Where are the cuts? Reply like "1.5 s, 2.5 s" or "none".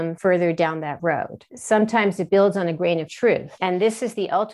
1.5 s, 3.5 s